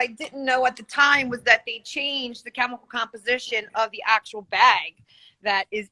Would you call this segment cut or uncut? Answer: uncut